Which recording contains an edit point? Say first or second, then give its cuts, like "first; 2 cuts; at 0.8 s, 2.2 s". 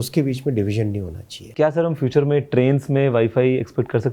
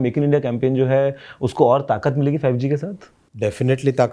first; 1 cut; at 1.5 s